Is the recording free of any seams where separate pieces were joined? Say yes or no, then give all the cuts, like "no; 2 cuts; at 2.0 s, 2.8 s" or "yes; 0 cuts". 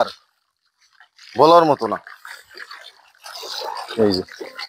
yes; 0 cuts